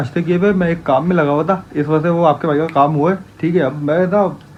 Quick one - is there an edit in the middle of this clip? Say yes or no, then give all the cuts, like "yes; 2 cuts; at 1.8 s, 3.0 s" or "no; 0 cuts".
no; 0 cuts